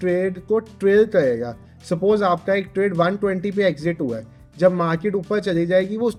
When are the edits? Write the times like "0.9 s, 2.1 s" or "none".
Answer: none